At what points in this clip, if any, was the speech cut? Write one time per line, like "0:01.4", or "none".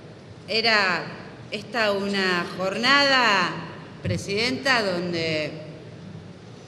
0:03.9